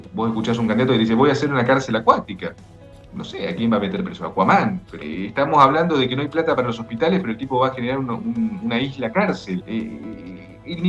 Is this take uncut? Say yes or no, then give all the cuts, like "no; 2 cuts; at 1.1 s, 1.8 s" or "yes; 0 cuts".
no; 2 cuts; at 4.9 s, 9.6 s